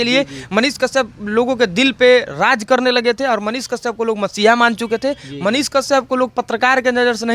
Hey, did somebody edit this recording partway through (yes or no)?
no